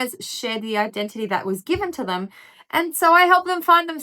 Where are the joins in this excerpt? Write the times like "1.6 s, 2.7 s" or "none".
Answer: none